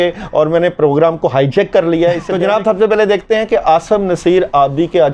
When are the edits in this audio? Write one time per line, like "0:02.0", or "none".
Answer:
0:02.3